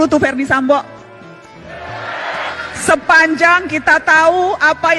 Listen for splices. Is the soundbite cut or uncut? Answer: cut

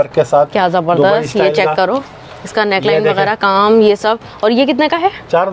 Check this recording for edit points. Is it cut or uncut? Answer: uncut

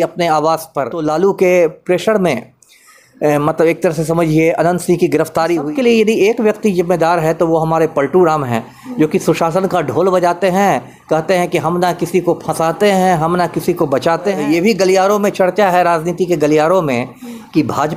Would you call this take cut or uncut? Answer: cut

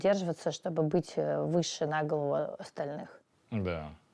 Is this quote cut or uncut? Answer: uncut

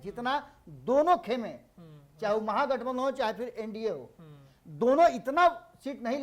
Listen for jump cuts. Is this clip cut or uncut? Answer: uncut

